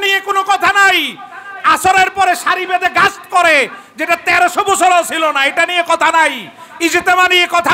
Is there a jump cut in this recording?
no; 0 cuts

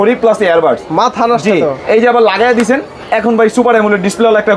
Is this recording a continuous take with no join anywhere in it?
yes; 0 cuts

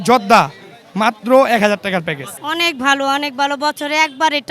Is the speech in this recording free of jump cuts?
no; 1 cut; at 2.3 s

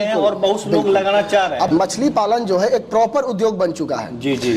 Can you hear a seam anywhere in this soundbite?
yes; 1 cut; at 1.7 s

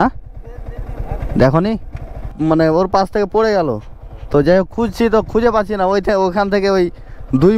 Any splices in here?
yes; 1 cut; at 2.2 s

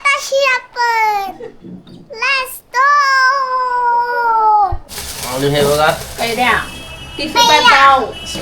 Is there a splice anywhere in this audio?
yes; 1 cut; at 5.1 s

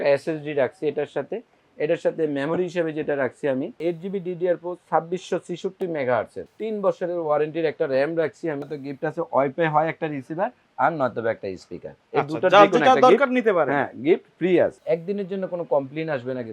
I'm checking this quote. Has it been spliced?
yes; 4 cuts; at 3.7 s, 6.4 s, 8.7 s, 14.8 s

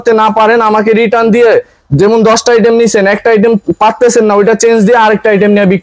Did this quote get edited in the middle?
no; 0 cuts

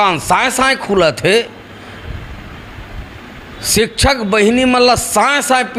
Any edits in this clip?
no; 0 cuts

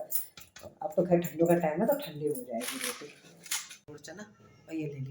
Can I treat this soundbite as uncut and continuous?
no; 1 cut; at 4.0 s

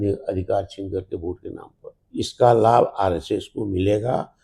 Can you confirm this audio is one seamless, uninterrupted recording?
no; 1 cut; at 1.9 s

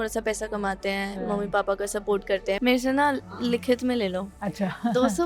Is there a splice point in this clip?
yes; 1 cut; at 2.6 s

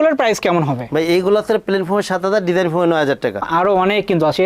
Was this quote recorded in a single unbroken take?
no; 1 cut; at 3.5 s

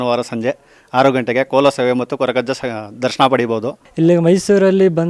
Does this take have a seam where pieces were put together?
yes; 1 cut; at 3.8 s

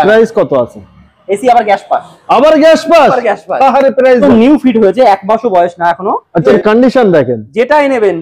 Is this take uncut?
no; 2 cuts; at 4.2 s, 6.5 s

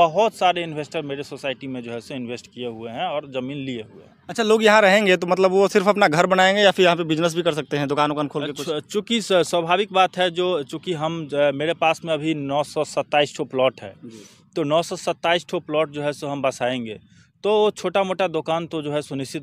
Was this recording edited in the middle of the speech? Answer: no; 0 cuts

